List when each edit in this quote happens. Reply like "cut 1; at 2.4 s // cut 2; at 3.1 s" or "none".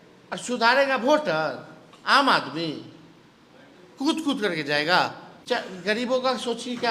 cut 1; at 5.3 s